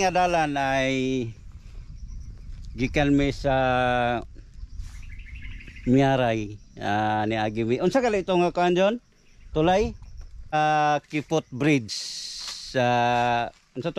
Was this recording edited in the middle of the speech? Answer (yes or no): yes